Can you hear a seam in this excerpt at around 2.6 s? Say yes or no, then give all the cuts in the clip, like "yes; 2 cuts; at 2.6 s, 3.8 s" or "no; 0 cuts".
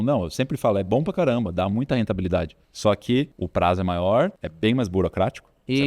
yes; 3 cuts; at 2.6 s, 3.4 s, 4.4 s